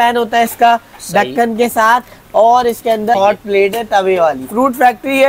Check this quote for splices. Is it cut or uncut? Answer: cut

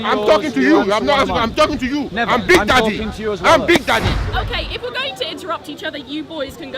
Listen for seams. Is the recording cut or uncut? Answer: cut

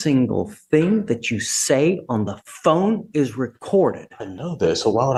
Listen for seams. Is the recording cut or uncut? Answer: uncut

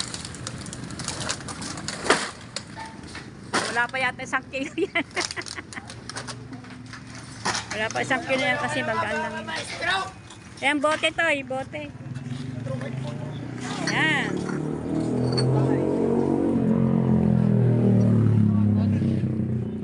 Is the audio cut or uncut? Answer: uncut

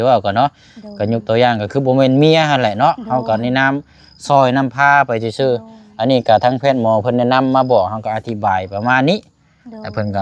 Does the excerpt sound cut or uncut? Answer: uncut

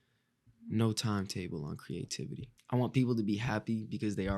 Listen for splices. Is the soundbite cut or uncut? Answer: cut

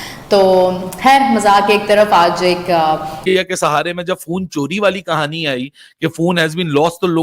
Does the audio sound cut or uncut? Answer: cut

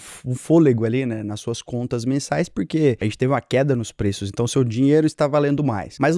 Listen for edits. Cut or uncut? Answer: uncut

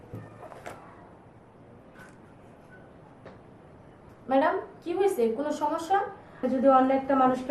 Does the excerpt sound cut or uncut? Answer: cut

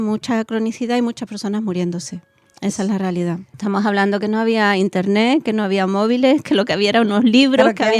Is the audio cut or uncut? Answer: cut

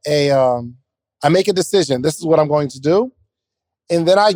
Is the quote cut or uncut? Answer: uncut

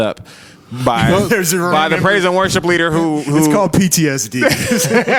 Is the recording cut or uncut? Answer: uncut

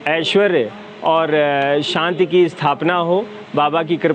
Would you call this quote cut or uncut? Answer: uncut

